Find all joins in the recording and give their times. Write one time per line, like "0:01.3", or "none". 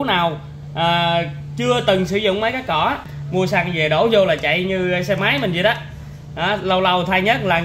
0:03.1